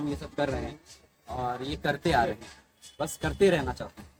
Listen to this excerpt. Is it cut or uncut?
uncut